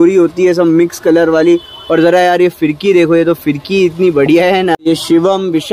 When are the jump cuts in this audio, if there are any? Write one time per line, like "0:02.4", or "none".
0:04.8